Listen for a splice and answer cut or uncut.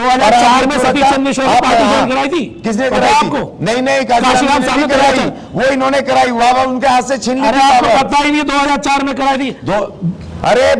uncut